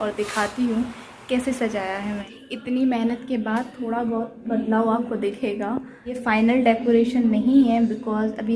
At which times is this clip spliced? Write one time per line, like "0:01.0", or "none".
0:02.2
0:06.2